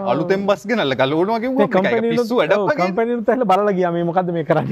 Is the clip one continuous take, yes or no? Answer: yes